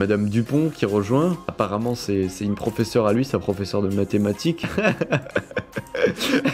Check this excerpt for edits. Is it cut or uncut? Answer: uncut